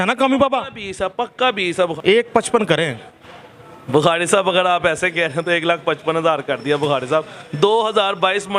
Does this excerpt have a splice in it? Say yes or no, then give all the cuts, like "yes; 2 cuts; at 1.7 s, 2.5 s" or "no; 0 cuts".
yes; 1 cut; at 1.9 s